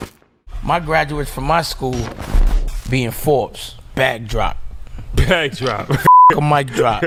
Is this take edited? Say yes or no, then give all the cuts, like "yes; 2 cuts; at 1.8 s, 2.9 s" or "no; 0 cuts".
no; 0 cuts